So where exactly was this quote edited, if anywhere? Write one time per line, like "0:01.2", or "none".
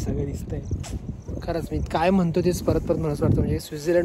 none